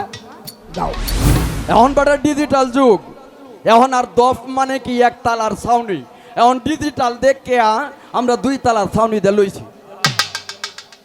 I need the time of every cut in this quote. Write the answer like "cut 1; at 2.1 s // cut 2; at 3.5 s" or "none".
cut 1; at 1.5 s